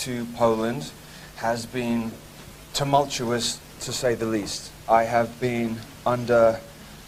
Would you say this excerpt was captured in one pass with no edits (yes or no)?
yes